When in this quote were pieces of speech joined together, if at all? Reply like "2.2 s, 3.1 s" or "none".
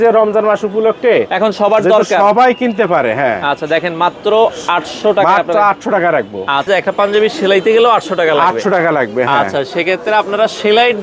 6.7 s